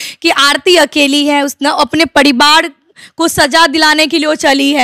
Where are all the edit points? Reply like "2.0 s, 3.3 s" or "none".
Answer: none